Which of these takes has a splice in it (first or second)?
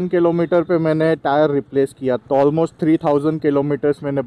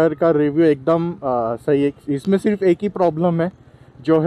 first